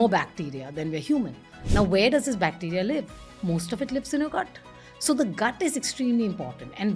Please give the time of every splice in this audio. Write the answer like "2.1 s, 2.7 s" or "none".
none